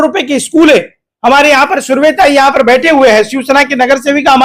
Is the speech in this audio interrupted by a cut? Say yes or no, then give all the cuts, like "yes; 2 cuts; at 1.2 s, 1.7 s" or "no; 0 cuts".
no; 0 cuts